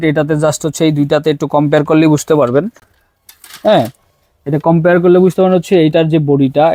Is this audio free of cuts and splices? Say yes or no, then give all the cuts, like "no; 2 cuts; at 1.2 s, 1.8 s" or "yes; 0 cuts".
yes; 0 cuts